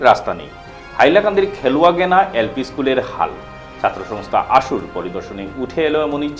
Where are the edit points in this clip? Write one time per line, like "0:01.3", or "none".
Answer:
none